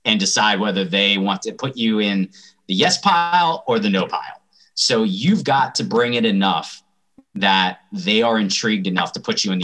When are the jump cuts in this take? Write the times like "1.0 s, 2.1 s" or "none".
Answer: 5.8 s